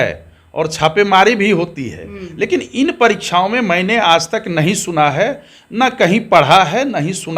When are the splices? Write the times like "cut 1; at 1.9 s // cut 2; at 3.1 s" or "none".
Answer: none